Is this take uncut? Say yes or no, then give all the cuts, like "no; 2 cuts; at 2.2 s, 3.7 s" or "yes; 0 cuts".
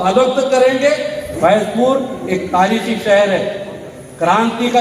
no; 1 cut; at 1.2 s